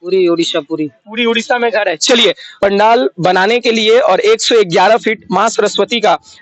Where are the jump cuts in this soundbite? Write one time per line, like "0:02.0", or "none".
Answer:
0:02.5